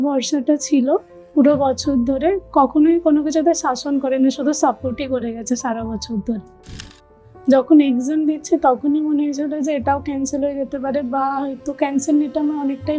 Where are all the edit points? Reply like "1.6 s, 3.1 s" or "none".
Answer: 6.7 s